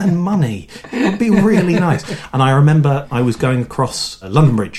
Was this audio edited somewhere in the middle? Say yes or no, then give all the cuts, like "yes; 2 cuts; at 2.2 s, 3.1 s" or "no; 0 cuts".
no; 0 cuts